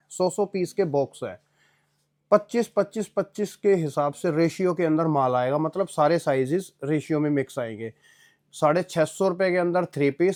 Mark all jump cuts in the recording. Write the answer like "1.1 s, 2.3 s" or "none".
none